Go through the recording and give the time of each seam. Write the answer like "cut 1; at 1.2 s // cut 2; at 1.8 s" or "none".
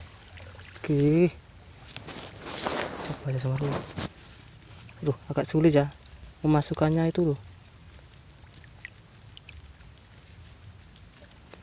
none